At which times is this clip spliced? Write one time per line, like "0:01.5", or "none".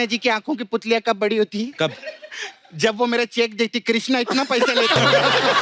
none